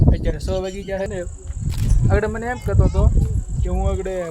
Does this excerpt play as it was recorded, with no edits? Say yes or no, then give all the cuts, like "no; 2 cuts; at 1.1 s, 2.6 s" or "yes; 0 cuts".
no; 1 cut; at 1.1 s